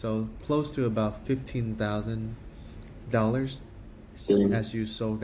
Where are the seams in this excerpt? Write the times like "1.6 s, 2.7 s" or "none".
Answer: none